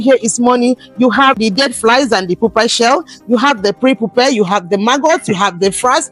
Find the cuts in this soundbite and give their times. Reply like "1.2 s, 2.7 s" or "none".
1.4 s